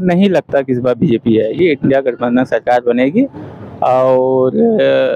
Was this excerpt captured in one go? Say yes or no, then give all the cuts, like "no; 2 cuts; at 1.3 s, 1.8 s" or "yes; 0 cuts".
yes; 0 cuts